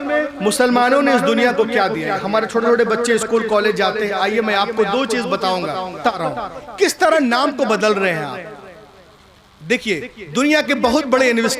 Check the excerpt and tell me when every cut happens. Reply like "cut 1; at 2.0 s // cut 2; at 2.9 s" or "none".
cut 1; at 6.1 s